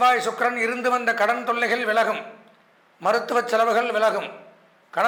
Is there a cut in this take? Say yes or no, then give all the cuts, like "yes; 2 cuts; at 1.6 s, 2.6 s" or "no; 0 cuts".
no; 0 cuts